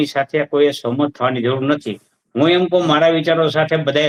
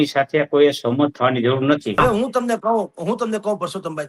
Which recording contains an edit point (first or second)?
second